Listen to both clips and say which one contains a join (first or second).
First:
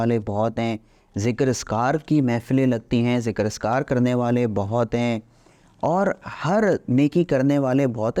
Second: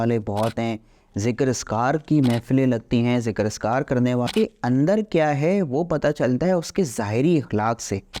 second